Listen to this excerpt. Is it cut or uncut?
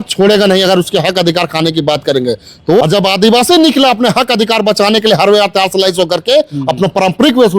cut